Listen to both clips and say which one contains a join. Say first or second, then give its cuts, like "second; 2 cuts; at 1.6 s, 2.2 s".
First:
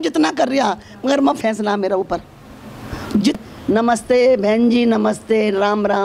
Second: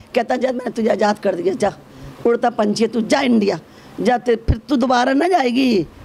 first; 1 cut; at 3.4 s